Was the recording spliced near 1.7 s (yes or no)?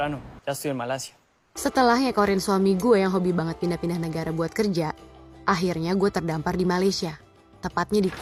no